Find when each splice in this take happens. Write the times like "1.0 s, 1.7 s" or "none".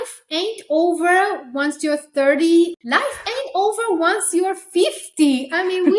2.8 s